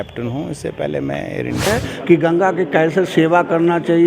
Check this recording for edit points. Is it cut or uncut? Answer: cut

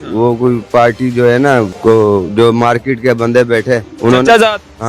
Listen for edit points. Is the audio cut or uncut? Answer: cut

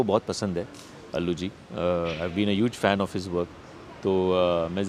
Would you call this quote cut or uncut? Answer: uncut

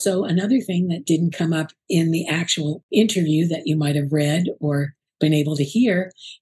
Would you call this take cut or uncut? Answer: cut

